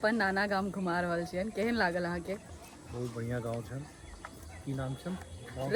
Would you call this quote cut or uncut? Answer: uncut